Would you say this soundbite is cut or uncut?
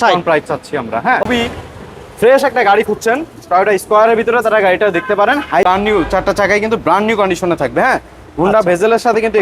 cut